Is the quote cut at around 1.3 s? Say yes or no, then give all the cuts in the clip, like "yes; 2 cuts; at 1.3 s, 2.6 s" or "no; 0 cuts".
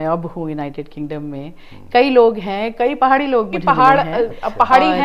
no; 1 cut; at 3.6 s